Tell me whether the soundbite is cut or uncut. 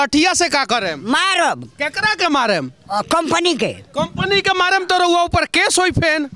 uncut